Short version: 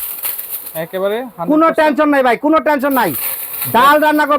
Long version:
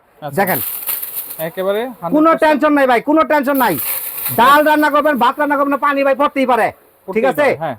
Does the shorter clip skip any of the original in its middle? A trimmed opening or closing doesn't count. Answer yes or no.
no